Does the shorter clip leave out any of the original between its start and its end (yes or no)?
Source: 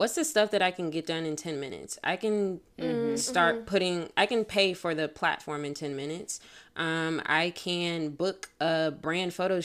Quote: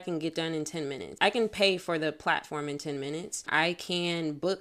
yes